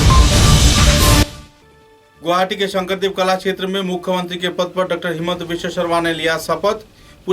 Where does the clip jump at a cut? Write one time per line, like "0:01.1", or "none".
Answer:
0:01.4